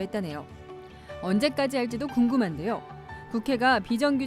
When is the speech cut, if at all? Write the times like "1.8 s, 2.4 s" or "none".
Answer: 2.1 s